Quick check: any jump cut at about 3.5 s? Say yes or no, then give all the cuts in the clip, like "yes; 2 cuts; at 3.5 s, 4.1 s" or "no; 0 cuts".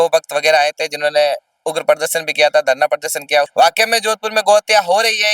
yes; 1 cut; at 3.5 s